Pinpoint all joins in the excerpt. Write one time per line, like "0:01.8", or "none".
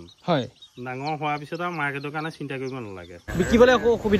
0:03.3